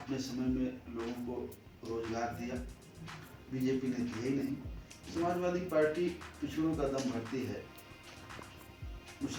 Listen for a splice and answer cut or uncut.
uncut